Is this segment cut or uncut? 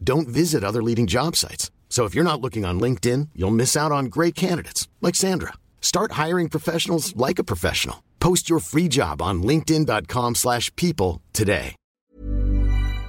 cut